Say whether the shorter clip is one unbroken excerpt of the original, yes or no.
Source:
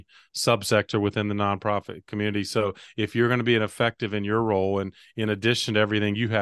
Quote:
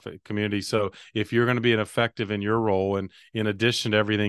yes